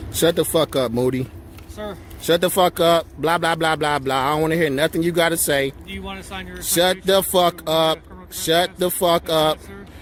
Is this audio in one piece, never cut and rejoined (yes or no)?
yes